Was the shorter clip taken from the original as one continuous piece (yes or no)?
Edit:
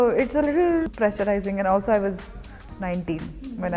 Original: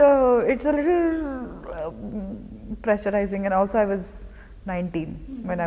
no